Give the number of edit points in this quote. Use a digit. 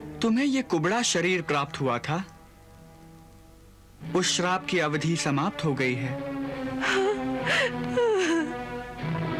0